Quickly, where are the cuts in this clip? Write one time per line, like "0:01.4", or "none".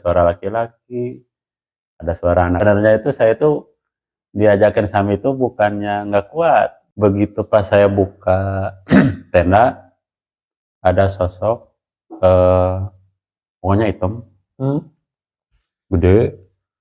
0:02.6
0:06.8